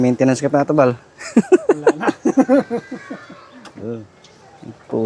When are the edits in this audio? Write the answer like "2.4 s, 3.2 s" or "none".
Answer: 4.2 s